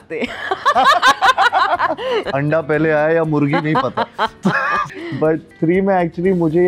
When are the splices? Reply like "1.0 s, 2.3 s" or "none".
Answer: 2.3 s, 4.9 s